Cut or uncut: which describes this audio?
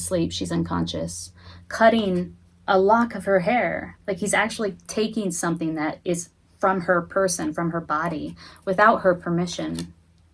uncut